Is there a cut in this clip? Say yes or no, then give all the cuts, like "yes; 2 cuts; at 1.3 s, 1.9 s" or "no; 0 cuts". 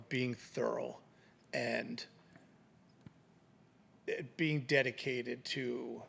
no; 0 cuts